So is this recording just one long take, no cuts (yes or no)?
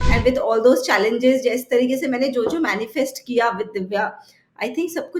yes